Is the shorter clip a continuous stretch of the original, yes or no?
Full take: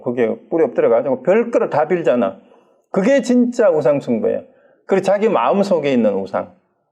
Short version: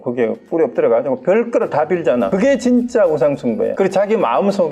no